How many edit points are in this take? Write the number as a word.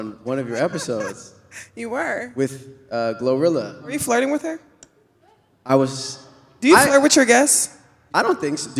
one